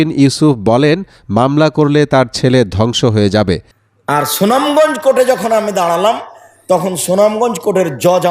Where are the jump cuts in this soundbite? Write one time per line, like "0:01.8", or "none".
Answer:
0:03.7